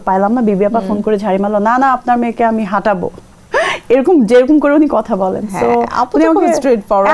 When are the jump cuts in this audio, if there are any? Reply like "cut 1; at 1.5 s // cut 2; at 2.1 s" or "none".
none